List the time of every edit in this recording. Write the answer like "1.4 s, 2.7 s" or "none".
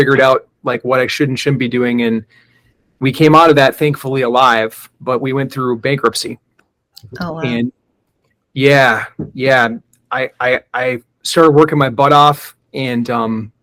none